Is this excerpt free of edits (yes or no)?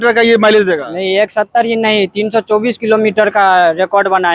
yes